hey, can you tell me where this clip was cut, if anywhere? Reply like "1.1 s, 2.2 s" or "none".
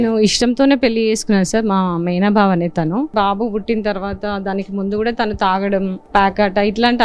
3.1 s, 6.0 s